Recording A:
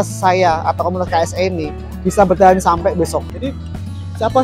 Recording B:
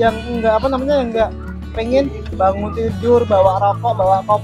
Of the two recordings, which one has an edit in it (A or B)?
A